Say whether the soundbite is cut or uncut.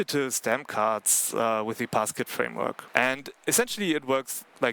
cut